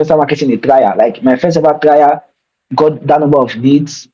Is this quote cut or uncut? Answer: uncut